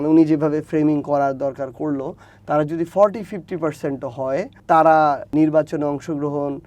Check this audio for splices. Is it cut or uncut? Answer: cut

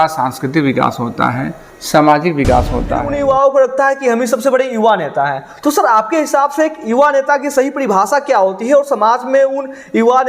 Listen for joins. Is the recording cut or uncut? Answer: cut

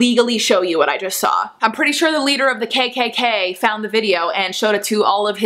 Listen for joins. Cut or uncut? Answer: cut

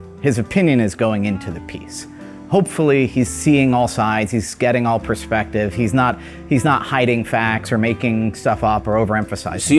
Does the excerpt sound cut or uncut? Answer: uncut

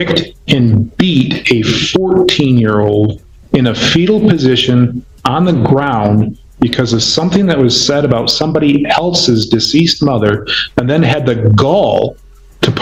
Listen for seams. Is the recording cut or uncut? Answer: uncut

